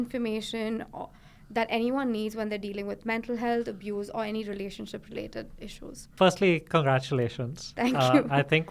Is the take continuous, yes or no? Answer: yes